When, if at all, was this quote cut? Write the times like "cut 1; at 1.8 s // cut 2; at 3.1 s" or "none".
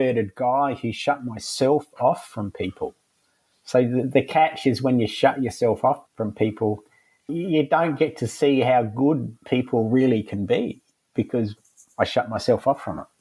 cut 1; at 6.1 s // cut 2; at 7.3 s